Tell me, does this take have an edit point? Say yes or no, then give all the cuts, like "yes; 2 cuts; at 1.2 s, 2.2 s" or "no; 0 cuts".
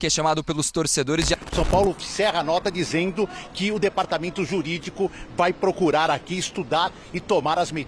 yes; 1 cut; at 1.3 s